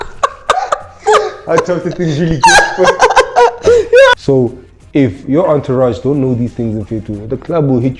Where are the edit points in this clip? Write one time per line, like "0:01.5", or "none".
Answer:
0:04.1